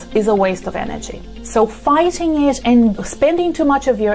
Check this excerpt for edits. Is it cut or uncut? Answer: cut